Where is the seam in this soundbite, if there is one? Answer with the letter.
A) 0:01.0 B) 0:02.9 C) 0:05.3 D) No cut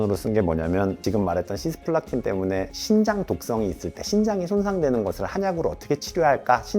A